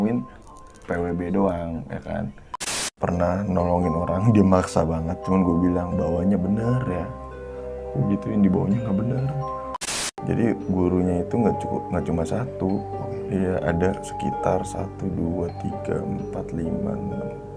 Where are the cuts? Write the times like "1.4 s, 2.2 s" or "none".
2.8 s, 9.8 s